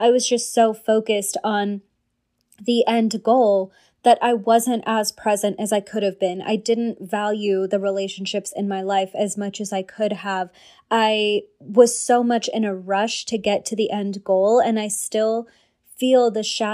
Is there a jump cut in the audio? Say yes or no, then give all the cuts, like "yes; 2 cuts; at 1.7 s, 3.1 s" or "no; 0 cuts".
no; 0 cuts